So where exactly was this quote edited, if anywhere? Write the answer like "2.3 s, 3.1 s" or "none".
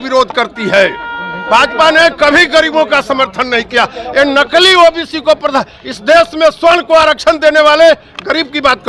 none